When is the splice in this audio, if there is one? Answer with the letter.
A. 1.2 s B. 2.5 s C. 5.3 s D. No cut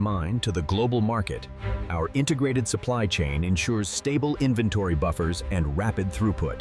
D